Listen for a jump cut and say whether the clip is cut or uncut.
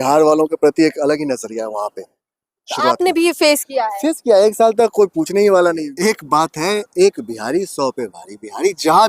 cut